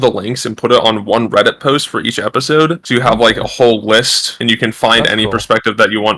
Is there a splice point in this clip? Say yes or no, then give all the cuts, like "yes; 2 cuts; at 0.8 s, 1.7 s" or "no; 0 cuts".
no; 0 cuts